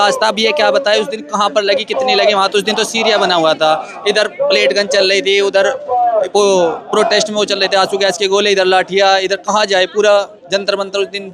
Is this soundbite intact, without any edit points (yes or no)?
yes